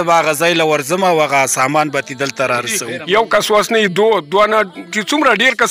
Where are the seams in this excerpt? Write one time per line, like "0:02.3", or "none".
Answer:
0:03.3

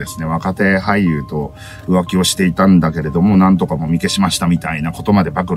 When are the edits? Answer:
none

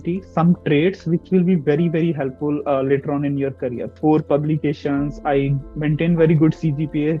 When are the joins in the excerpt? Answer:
0:03.9

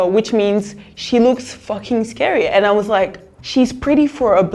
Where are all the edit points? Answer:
0:03.3

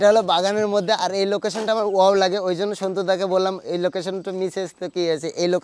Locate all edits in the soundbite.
none

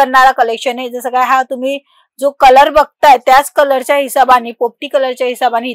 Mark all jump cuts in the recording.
none

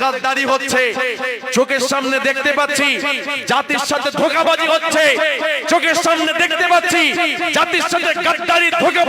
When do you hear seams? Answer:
none

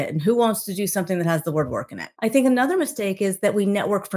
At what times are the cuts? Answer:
0:02.0

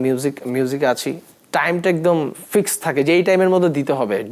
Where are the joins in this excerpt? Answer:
0:01.3

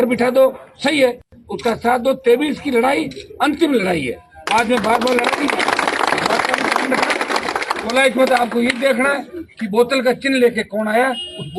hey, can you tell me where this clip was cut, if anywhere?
none

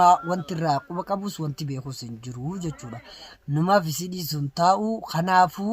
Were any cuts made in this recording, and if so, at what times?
0:03.4

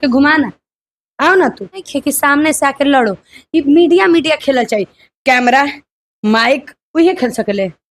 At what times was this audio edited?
0:01.9

